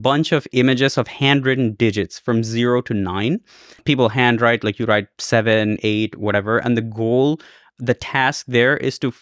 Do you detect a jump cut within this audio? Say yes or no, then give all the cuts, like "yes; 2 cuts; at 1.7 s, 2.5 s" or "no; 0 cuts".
no; 0 cuts